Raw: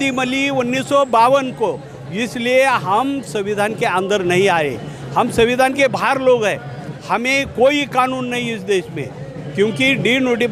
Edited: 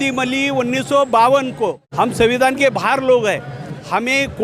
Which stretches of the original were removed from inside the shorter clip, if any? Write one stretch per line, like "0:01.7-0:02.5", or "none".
0:01.8-0:05.0

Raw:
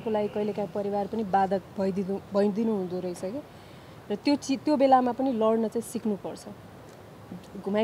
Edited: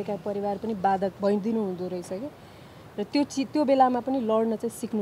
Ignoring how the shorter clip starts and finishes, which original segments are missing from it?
0:01.6-0:02.3

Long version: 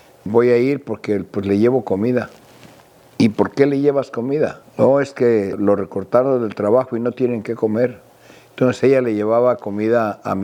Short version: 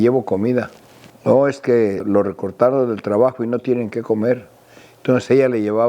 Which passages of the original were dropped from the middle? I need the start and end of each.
0:02.7-0:04.6

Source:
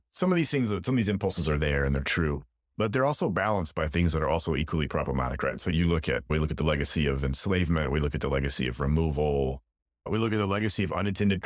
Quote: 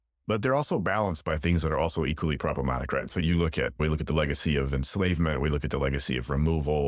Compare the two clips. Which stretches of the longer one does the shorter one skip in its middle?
none

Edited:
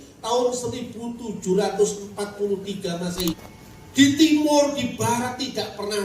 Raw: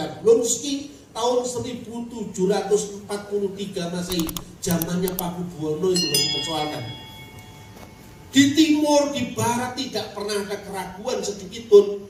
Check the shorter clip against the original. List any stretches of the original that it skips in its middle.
0:04.4-0:07.9

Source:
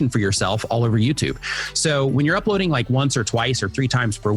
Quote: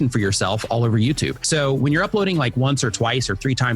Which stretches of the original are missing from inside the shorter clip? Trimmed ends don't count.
0:01.4-0:01.7

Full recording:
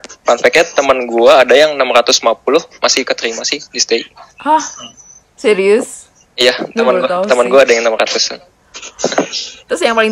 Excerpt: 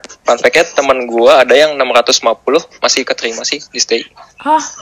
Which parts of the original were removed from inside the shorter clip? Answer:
none

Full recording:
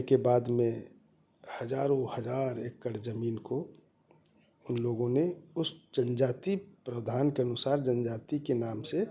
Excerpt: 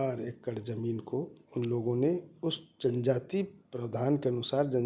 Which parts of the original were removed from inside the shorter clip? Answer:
0:03.8-0:04.5

